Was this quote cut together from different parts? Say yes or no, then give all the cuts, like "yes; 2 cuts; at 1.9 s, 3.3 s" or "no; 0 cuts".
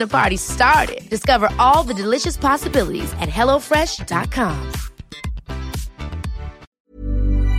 yes; 1 cut; at 6.6 s